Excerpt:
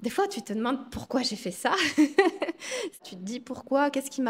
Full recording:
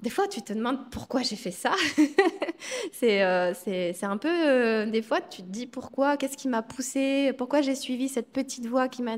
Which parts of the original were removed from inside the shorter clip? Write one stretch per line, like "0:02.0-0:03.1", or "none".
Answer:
0:03.0-0:05.2